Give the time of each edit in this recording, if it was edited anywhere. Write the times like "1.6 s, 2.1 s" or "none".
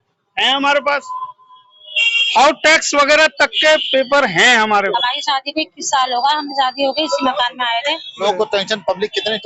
4.9 s, 8.2 s